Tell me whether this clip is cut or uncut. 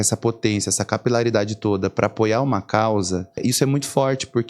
cut